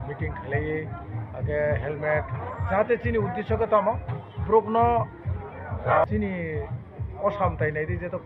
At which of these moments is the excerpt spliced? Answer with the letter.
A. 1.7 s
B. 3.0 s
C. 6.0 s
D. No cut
C